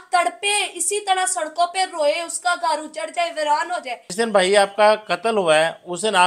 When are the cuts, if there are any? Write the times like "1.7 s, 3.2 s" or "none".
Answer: none

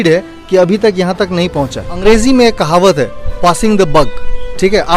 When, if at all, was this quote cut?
2.0 s

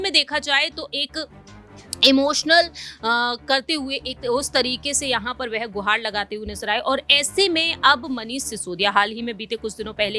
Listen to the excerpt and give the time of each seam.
none

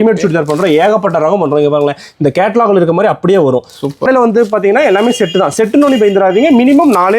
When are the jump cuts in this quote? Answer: 4.1 s

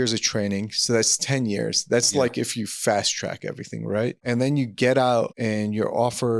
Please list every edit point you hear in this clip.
4.2 s, 5.3 s

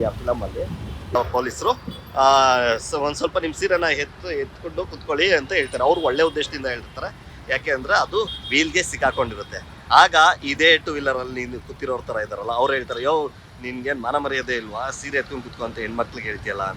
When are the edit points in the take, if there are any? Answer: 1.1 s

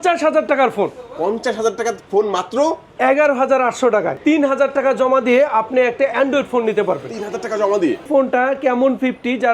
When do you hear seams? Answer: 4.1 s, 8.0 s

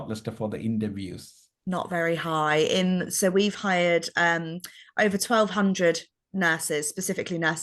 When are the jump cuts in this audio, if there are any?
none

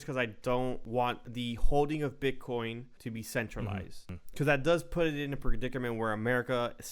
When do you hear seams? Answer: 1.1 s, 2.9 s, 4.2 s

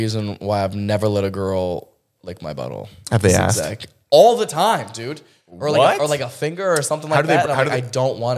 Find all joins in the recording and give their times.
none

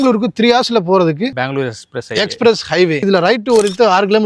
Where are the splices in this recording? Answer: 1.4 s, 3.0 s

